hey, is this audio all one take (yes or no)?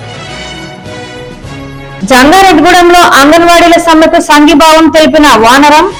yes